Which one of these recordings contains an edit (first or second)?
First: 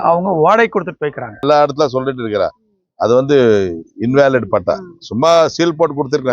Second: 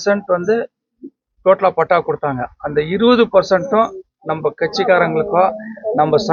first